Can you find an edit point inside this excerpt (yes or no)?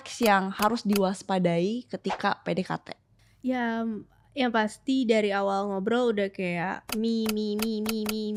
no